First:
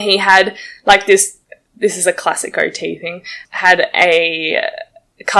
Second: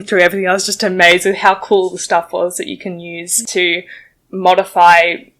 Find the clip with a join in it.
second; 1 cut; at 3.3 s

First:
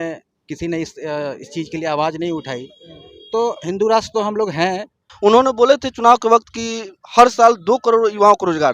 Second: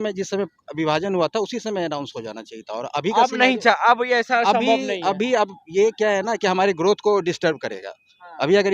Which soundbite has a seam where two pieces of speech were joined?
first; 1 cut; at 5.0 s

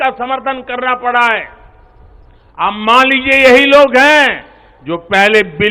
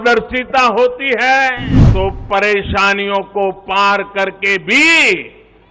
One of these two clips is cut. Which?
second; 1 cut; at 1.7 s

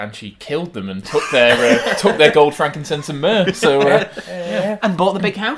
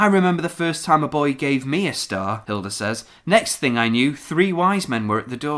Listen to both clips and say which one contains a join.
second; 1 cut; at 2.4 s

